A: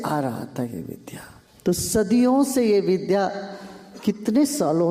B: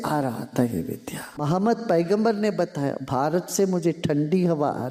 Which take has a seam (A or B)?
B